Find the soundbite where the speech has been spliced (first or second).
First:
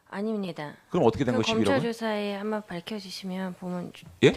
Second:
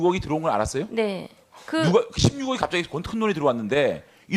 first